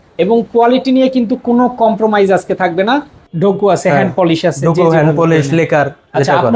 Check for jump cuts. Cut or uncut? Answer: cut